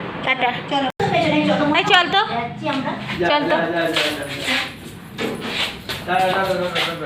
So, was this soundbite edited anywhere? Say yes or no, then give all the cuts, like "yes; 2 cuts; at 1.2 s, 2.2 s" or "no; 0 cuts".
yes; 1 cut; at 1.0 s